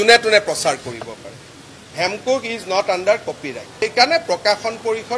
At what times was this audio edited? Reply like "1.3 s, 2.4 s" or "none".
3.8 s